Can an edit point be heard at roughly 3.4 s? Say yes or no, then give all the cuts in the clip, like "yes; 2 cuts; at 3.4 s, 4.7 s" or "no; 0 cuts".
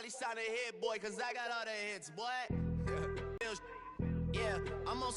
yes; 1 cut; at 3.4 s